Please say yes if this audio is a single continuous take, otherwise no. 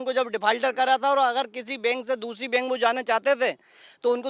yes